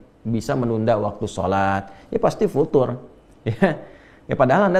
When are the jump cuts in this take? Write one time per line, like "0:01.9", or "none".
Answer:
none